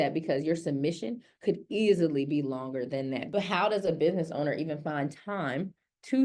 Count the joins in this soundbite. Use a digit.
1